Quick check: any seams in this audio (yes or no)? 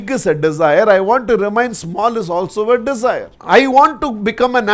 yes